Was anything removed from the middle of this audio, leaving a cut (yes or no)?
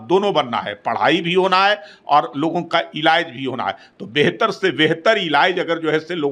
no